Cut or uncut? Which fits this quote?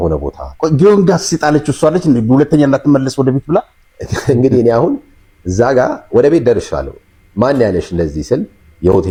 uncut